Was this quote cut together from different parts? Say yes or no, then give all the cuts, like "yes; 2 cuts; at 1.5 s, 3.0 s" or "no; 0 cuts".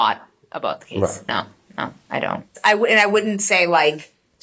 yes; 1 cut; at 2.5 s